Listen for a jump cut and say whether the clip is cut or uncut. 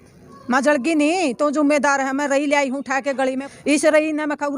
cut